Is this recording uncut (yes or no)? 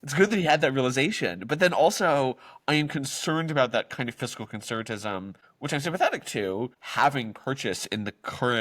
no